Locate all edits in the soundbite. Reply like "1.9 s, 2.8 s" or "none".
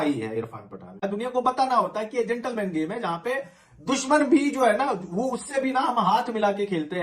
1.0 s